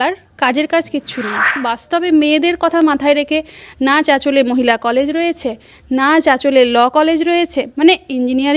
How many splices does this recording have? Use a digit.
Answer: 1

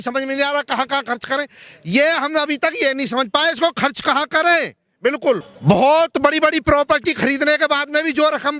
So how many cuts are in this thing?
1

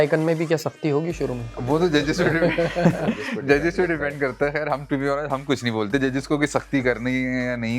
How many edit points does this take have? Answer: 1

